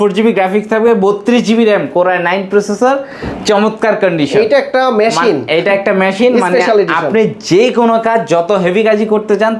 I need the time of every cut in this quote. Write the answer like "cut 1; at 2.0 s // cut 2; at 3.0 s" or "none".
none

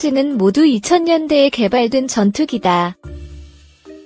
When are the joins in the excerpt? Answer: cut 1; at 3.0 s

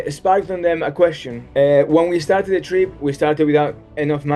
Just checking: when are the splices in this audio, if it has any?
cut 1; at 1.3 s

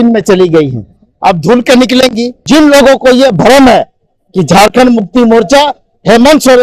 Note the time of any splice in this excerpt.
cut 1; at 2.4 s

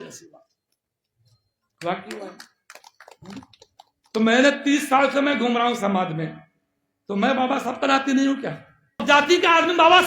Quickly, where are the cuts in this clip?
cut 1; at 9.0 s

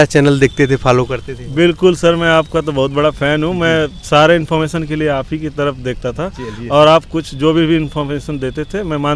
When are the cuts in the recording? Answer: none

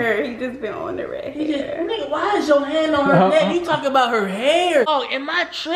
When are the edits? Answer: cut 1; at 4.9 s

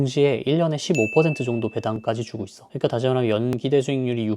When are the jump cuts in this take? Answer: cut 1; at 2.0 s

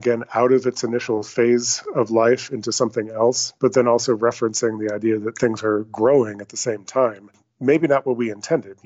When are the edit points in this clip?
none

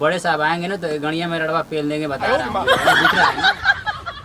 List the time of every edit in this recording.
cut 1; at 2.2 s

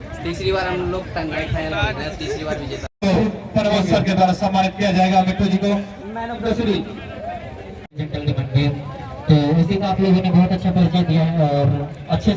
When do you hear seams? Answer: cut 1; at 3.0 s // cut 2; at 8.0 s

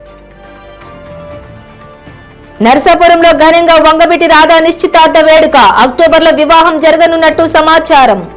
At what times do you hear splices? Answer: cut 1; at 1.0 s

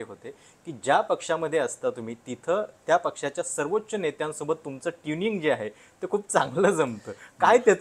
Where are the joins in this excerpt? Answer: none

